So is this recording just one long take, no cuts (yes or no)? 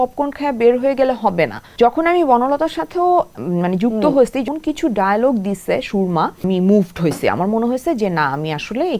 no